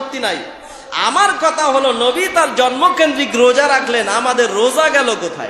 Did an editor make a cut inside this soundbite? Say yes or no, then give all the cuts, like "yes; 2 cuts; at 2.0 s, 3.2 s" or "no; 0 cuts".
no; 0 cuts